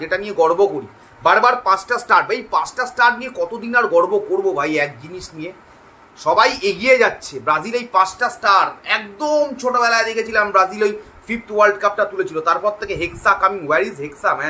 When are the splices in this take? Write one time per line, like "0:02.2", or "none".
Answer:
none